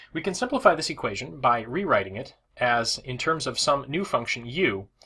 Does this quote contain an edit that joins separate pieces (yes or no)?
yes